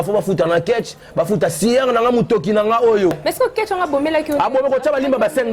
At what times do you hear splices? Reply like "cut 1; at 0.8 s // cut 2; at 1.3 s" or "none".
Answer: cut 1; at 3.2 s

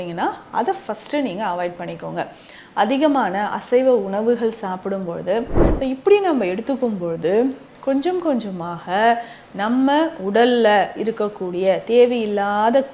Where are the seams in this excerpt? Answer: cut 1; at 5.6 s

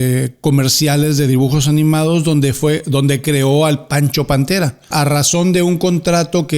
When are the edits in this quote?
cut 1; at 4.9 s

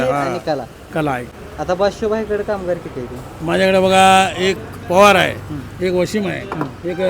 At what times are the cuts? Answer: cut 1; at 1.4 s

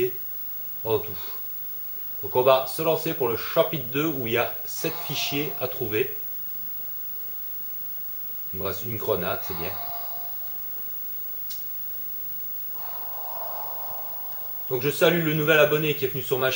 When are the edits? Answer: none

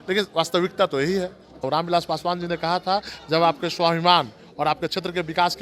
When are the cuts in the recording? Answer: cut 1; at 1.6 s

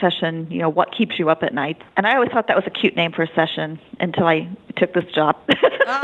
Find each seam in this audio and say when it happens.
cut 1; at 1.8 s

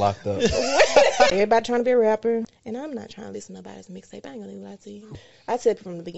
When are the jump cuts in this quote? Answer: cut 1; at 1.3 s // cut 2; at 2.6 s // cut 3; at 5.0 s

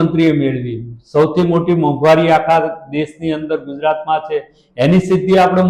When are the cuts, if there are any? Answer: none

